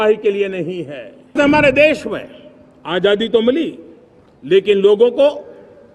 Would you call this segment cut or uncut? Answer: cut